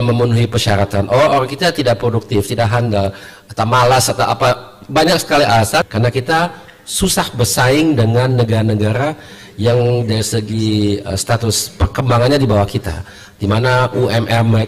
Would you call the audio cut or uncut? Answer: cut